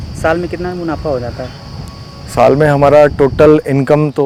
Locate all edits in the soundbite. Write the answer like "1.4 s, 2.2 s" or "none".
none